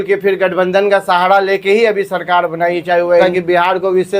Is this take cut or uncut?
cut